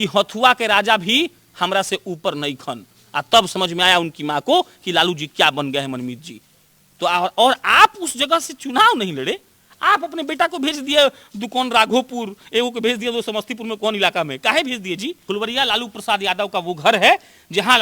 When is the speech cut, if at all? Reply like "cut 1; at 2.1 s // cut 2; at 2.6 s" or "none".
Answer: cut 1; at 15.2 s